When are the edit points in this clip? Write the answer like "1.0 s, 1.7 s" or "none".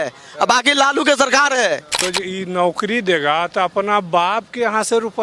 2.0 s